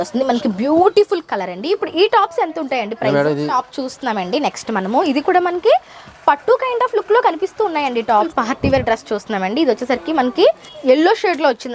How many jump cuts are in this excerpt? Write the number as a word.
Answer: three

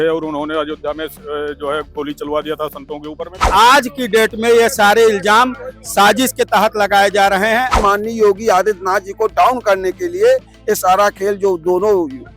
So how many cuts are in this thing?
two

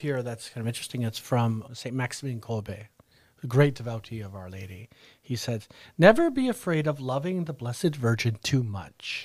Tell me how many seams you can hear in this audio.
one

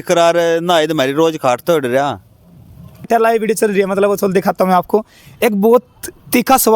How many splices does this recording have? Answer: one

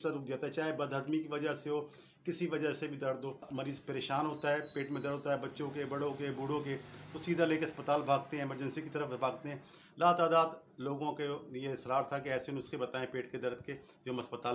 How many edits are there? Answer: two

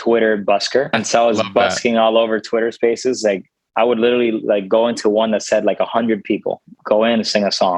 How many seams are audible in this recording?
two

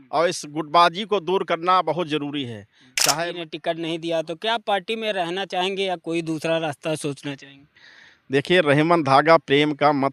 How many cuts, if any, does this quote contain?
one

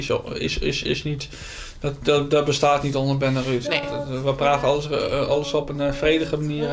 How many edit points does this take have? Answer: zero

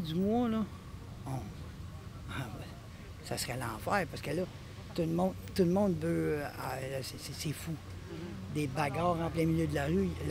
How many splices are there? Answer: zero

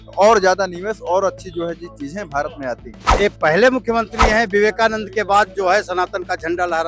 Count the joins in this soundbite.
one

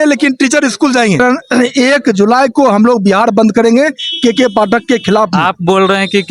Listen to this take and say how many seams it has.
two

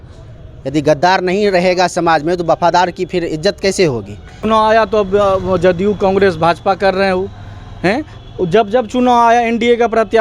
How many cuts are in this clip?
one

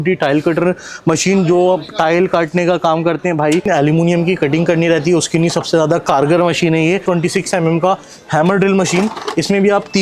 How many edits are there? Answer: two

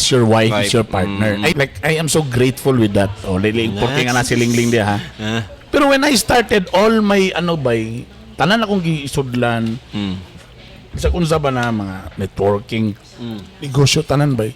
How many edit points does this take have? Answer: one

